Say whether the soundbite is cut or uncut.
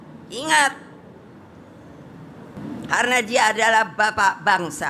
cut